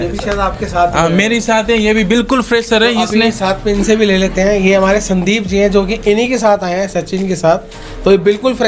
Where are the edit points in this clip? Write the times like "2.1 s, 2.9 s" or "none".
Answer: none